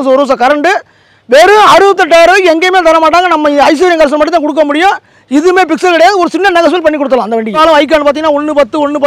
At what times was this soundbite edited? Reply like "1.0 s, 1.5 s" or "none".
7.6 s